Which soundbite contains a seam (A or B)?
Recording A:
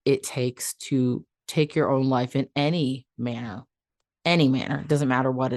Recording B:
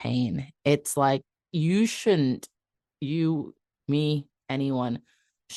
B